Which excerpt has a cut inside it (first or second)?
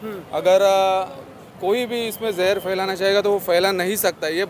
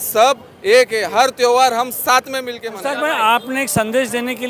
second